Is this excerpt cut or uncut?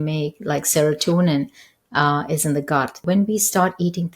cut